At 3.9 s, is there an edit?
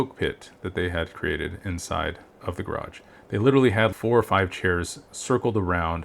yes; 1 cut; at 3.9 s

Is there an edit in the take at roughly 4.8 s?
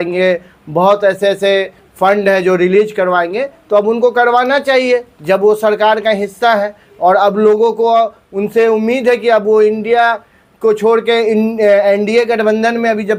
no; 0 cuts

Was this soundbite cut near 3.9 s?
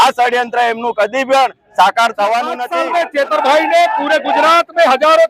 no; 1 cut; at 2.6 s

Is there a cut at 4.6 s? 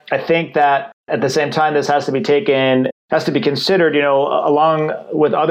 no; 2 cuts; at 1.1 s, 2.9 s

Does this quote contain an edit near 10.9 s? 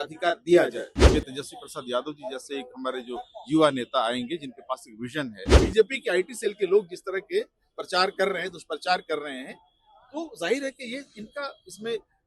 no; 2 cuts; at 1.0 s, 5.4 s

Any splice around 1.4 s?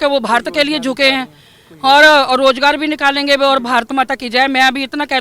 no; 0 cuts

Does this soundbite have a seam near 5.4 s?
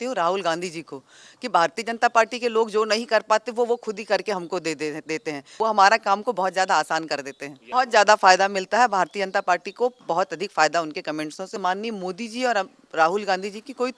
yes; 3 cuts; at 5.4 s, 7.6 s, 11.6 s

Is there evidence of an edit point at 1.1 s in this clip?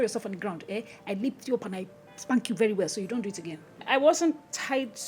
no; 1 cut; at 3.8 s

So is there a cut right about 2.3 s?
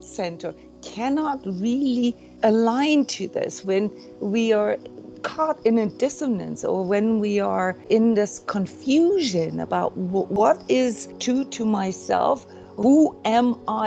yes; 5 cuts; at 2.3 s, 7.9 s, 10.3 s, 11.1 s, 12.7 s

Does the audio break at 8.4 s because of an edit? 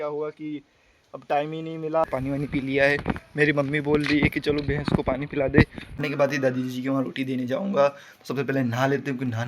no; 2 cuts; at 2.0 s, 6.0 s

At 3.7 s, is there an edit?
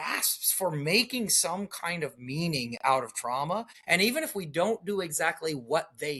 yes; 1 cut; at 3.7 s

